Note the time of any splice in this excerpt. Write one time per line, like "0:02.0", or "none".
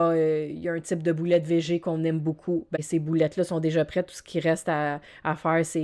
0:02.8